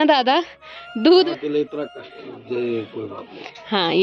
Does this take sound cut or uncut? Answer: cut